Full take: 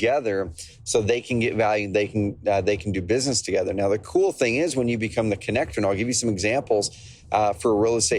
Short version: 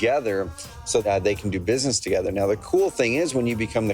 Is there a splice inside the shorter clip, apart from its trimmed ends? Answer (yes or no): yes